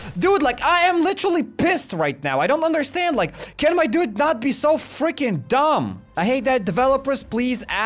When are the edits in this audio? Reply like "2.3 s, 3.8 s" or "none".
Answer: none